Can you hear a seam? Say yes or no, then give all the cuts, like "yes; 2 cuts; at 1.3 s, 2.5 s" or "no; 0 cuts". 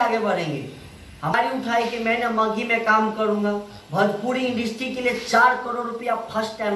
yes; 1 cut; at 1.2 s